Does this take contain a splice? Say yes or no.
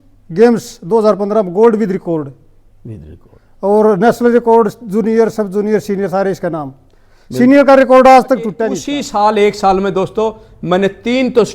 yes